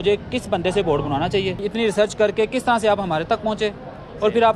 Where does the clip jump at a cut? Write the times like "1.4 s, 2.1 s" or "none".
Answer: 1.6 s